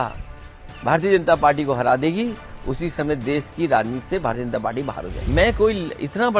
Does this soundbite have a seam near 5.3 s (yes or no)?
yes